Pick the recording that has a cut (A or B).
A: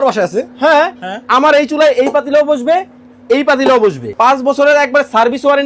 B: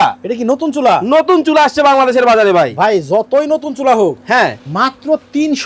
A